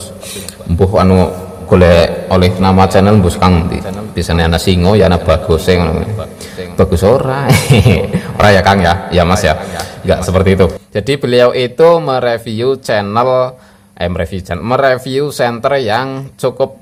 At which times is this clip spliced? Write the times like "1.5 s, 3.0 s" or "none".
none